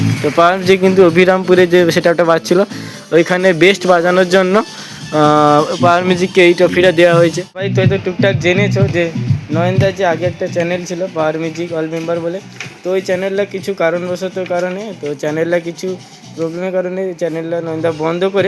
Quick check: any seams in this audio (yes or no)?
yes